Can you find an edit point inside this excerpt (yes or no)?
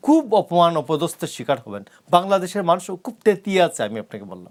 no